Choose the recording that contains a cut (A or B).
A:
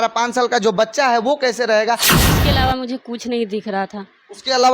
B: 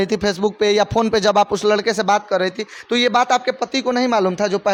A